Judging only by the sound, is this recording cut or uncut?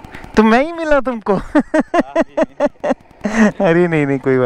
uncut